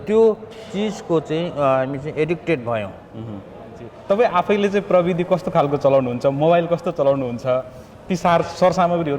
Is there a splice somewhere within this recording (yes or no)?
yes